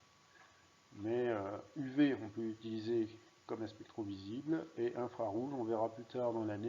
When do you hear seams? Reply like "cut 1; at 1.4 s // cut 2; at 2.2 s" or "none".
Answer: cut 1; at 2.2 s